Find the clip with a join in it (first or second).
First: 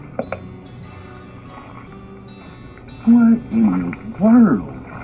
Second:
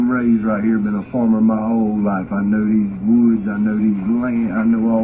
first